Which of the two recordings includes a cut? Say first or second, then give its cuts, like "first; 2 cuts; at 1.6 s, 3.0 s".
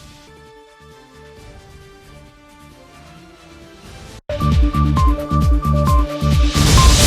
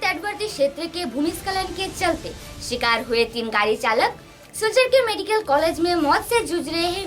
first; 1 cut; at 4.2 s